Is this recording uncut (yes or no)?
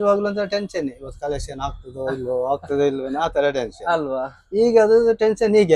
yes